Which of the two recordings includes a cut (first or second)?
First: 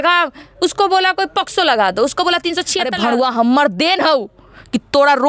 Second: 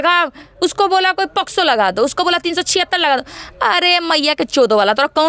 first